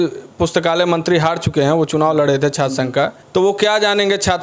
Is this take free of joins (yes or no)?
no